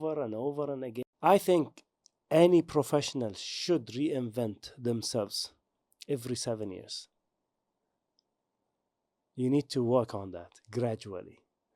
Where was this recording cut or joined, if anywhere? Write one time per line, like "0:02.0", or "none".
0:01.0